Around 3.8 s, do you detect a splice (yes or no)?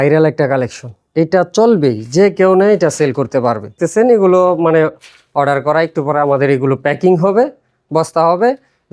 yes